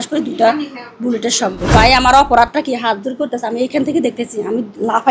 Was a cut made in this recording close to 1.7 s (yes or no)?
yes